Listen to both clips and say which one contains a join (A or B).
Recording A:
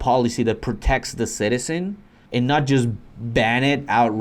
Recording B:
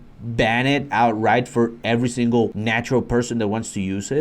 B